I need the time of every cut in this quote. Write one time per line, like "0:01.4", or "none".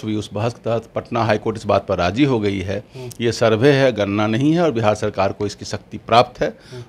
none